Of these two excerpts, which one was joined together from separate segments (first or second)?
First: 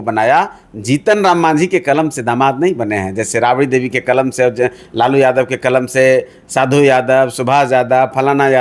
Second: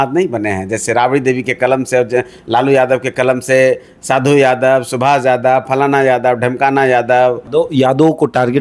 second